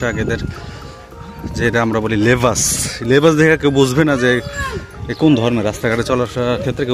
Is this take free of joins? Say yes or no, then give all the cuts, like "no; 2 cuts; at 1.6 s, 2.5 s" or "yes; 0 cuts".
yes; 0 cuts